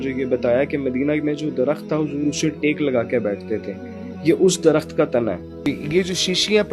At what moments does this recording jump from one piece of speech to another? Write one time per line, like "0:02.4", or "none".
0:05.5